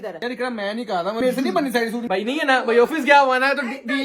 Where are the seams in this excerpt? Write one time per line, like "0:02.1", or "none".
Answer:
0:01.2
0:02.0